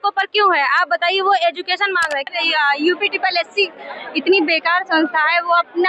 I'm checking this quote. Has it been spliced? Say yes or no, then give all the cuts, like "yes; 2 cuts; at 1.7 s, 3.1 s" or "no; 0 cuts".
yes; 1 cut; at 2.3 s